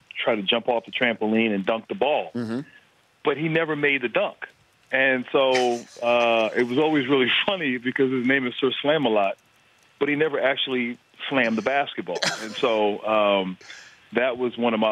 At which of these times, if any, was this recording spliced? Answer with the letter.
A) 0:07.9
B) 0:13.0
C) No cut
A